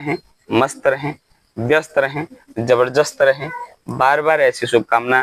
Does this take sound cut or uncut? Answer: uncut